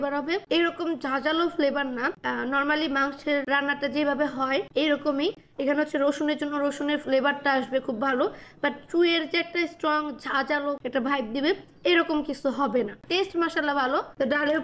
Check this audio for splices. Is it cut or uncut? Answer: uncut